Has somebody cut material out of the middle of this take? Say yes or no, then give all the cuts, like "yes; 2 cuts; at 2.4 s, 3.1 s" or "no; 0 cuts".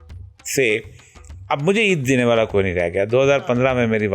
no; 0 cuts